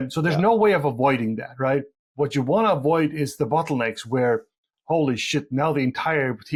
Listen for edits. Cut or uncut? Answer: uncut